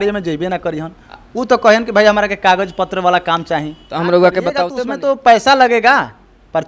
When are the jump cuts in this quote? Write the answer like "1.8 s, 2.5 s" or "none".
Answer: 4.7 s